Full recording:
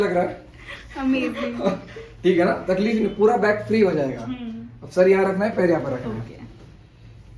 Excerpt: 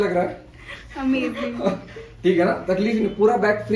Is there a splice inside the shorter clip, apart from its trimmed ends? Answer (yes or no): no